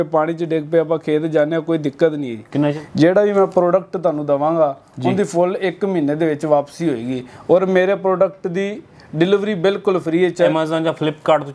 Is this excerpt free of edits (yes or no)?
no